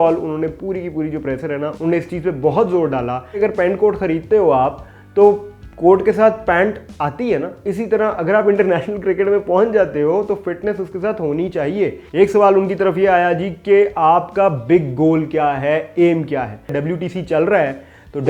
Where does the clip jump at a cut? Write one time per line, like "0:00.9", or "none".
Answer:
0:03.2
0:12.0
0:16.7